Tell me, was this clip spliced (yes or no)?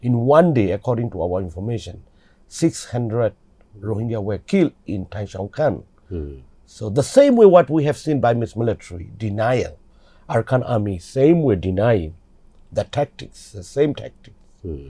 no